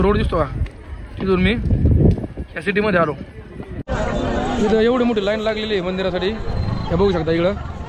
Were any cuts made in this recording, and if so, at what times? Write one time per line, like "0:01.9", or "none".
0:03.8